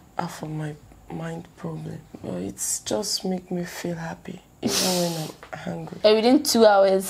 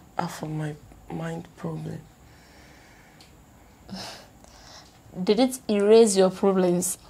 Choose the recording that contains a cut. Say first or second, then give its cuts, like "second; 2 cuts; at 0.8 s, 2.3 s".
first; 2 cuts; at 2.1 s, 5.9 s